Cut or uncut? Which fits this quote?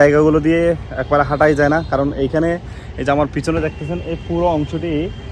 uncut